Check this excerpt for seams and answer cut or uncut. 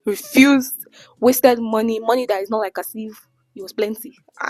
uncut